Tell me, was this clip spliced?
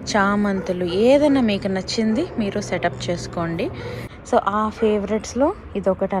yes; 1 cut; at 4.1 s

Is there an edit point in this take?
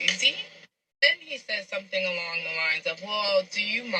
yes; 1 cut; at 1.0 s

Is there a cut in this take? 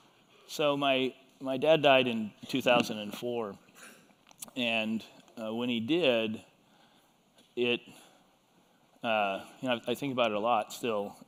no; 0 cuts

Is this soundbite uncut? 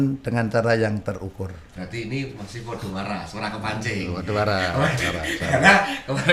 yes; 0 cuts

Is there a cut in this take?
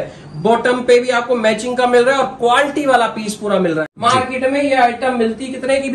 yes; 1 cut; at 3.9 s

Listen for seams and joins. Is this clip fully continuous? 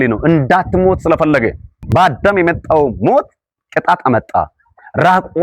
no; 1 cut; at 1.8 s

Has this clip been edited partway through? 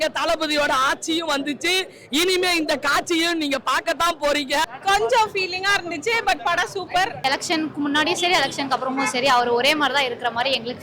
yes; 2 cuts; at 4.7 s, 7.2 s

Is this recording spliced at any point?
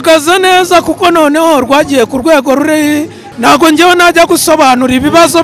yes; 1 cut; at 3.2 s

